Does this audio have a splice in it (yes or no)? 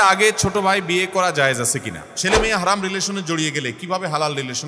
yes